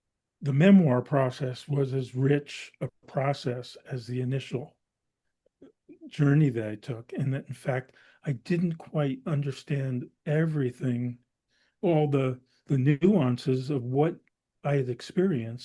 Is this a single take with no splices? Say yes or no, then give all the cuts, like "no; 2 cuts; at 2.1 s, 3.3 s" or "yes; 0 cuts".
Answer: yes; 0 cuts